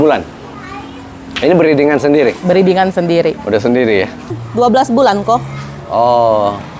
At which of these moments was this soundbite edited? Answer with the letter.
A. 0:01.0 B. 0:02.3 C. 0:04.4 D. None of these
C